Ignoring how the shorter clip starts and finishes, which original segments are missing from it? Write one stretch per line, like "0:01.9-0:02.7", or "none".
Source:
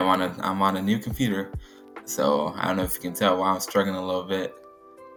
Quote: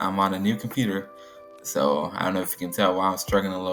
none